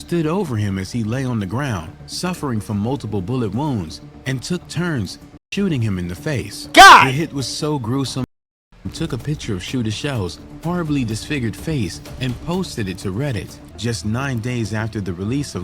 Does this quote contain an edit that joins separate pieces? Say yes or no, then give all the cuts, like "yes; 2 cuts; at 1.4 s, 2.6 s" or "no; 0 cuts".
yes; 2 cuts; at 8.2 s, 13.6 s